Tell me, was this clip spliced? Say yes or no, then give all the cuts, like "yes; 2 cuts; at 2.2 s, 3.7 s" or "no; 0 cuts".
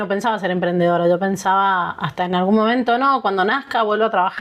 no; 0 cuts